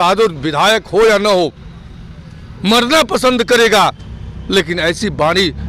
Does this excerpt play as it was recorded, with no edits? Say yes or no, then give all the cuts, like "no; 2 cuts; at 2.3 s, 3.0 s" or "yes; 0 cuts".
yes; 0 cuts